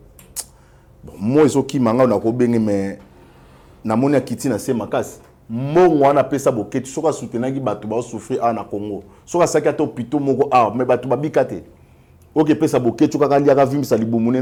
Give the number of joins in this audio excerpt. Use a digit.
0